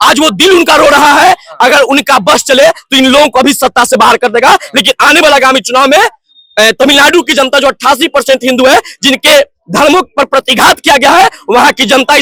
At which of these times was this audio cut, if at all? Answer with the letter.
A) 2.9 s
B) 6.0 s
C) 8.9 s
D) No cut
D